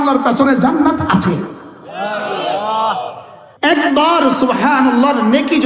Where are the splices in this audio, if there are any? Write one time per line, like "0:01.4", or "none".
none